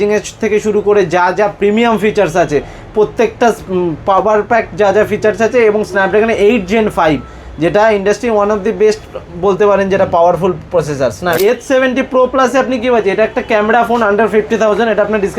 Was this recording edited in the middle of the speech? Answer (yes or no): yes